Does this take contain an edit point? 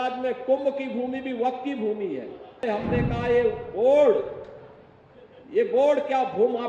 yes; 1 cut; at 2.6 s

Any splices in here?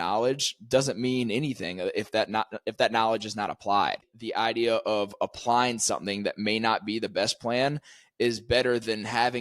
yes; 1 cut; at 4.1 s

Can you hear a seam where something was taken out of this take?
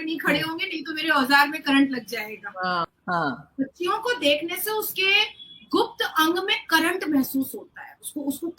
yes; 1 cut; at 2.9 s

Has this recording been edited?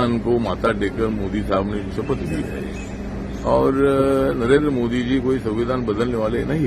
no; 0 cuts

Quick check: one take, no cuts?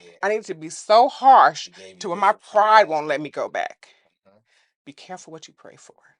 yes; 0 cuts

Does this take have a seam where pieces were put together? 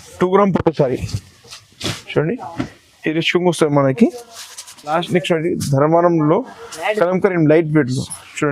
yes; 1 cut; at 4.8 s

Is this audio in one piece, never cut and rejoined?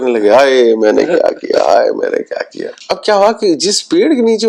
yes; 0 cuts

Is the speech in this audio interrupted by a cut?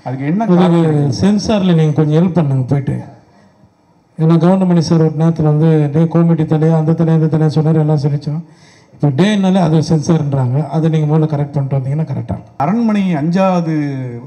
yes; 1 cut; at 12.6 s

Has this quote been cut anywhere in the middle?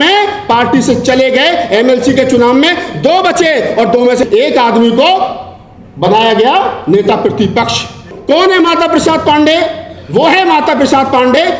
yes; 1 cut; at 8.1 s

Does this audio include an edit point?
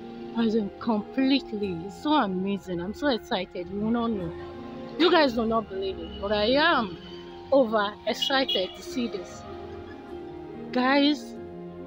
yes; 3 cuts; at 9.2 s, 10.7 s, 11.2 s

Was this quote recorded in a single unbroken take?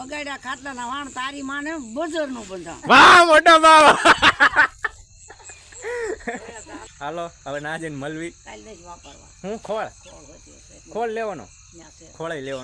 yes; 0 cuts

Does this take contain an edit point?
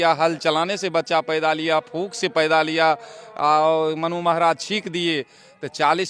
no; 0 cuts

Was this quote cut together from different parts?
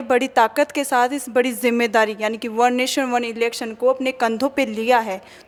no; 0 cuts

